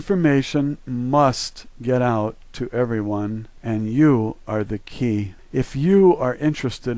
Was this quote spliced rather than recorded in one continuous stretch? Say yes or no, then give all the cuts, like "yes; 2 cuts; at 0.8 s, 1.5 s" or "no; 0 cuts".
yes; 1 cut; at 5.8 s